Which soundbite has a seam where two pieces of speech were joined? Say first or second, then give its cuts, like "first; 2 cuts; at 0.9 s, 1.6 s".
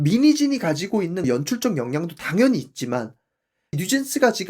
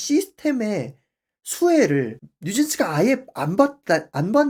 first; 1 cut; at 3.6 s